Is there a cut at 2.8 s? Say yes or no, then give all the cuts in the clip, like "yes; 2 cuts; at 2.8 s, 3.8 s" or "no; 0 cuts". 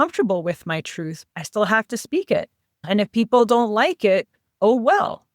yes; 2 cuts; at 1.2 s, 2.8 s